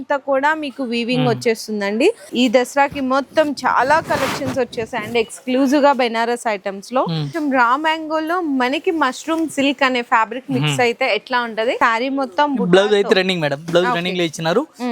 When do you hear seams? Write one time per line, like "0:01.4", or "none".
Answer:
0:02.3
0:07.3
0:11.8